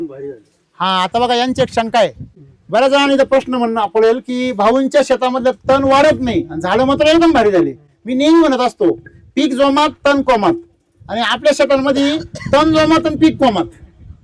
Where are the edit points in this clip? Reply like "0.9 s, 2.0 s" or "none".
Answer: none